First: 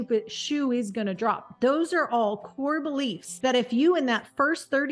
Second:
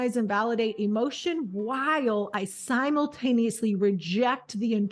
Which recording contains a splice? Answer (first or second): first